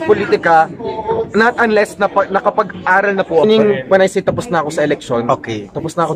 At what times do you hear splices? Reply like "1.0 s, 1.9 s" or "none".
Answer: 3.4 s